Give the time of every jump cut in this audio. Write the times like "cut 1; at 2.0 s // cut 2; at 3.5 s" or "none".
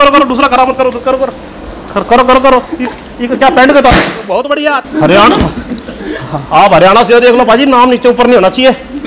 cut 1; at 4.8 s